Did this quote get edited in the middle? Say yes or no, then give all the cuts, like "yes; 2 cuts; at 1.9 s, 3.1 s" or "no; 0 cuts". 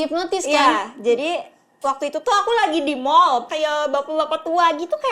yes; 1 cut; at 3.5 s